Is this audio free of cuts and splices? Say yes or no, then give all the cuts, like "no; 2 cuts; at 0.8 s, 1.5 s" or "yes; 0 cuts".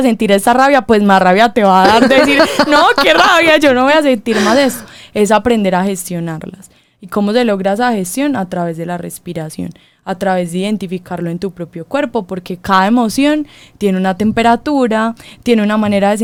yes; 0 cuts